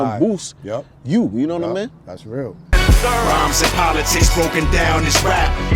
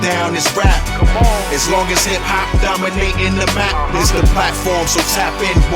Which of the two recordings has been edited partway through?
first; 1 cut; at 2.7 s

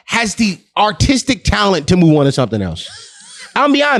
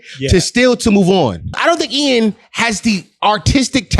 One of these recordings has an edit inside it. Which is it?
second; 1 cut; at 1.6 s

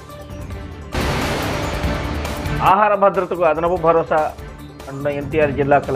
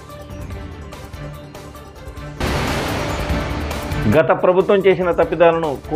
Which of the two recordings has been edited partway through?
first; 2 cuts; at 0.9 s, 2.4 s

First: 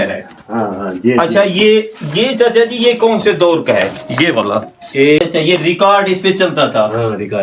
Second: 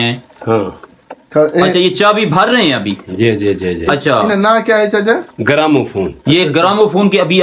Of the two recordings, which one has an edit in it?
first; 1 cut; at 5.2 s

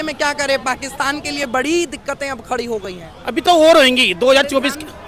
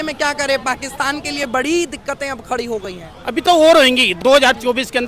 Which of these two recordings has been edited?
second; 1 cut; at 4.1 s

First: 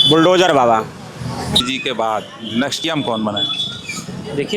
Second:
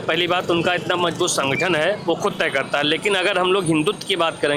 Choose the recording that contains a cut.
first; 2 cuts; at 1.6 s, 2.8 s

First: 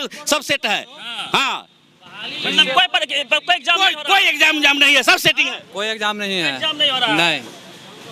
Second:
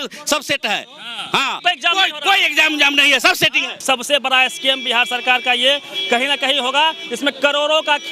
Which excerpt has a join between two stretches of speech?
second; 2 cuts; at 1.6 s, 3.8 s

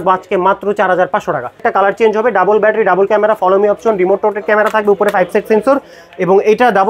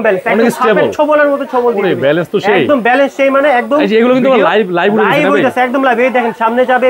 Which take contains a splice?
first; 1 cut; at 1.6 s

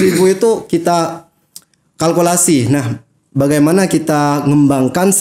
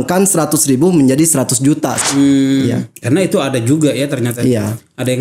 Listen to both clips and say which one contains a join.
second; 1 cut; at 2.0 s

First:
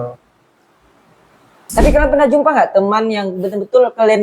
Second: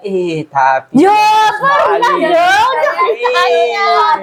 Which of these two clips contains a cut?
first; 1 cut; at 1.6 s

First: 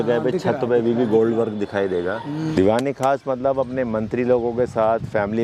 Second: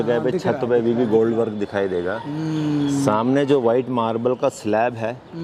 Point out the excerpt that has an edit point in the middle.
first; 1 cut; at 2.5 s

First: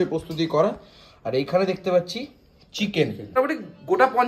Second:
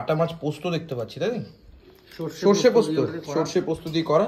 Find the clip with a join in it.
first; 1 cut; at 3.3 s

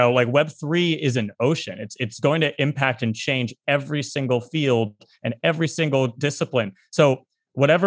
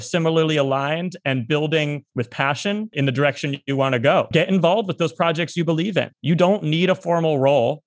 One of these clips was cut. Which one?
second; 3 cuts; at 2.9 s, 4.3 s, 6.2 s

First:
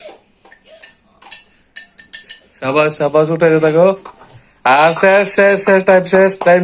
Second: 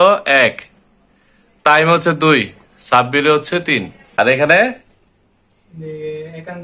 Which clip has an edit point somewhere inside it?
second; 1 cut; at 4.0 s

